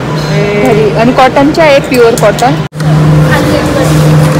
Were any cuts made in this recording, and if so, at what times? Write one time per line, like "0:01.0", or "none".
0:02.8